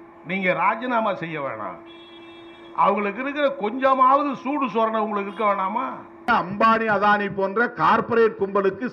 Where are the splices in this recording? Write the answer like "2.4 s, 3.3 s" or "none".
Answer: 6.3 s